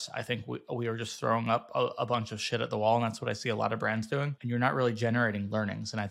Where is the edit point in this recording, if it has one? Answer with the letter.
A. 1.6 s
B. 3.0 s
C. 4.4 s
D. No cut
C